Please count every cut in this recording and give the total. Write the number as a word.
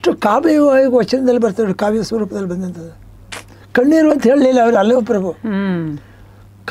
zero